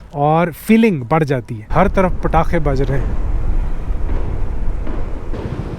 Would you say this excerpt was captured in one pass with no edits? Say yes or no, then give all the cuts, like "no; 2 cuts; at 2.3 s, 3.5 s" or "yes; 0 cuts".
no; 1 cut; at 1.6 s